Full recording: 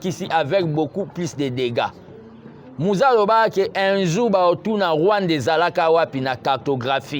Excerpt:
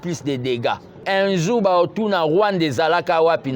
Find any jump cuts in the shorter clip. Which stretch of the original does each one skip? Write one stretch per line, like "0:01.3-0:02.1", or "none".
0:02.2-0:03.7

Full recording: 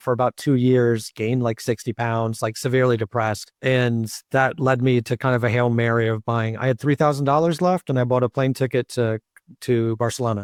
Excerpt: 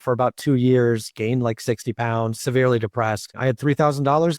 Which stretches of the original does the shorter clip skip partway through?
0:02.4-0:02.5
0:03.5-0:06.5

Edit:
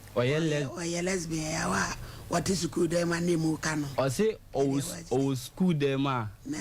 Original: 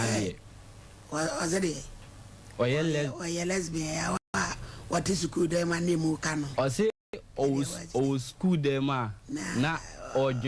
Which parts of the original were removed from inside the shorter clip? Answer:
0:04.2-0:04.3
0:07.0-0:07.3

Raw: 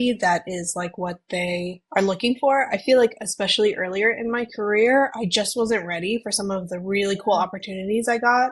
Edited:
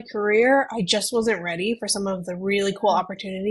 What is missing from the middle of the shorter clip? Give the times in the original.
none

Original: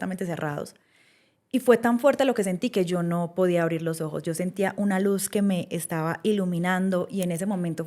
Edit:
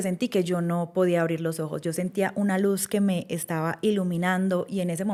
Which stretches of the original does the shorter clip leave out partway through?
none

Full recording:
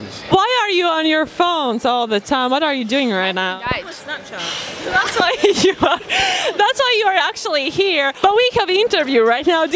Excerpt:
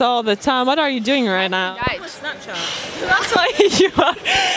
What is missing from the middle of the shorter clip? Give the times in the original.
none

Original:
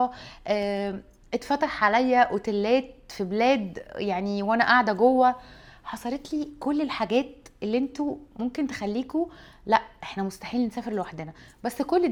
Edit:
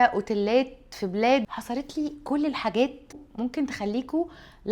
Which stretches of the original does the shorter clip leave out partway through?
0:03.8-0:05.9
0:07.5-0:08.2

